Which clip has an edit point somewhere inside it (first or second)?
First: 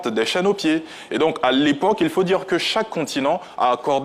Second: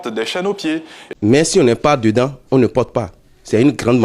second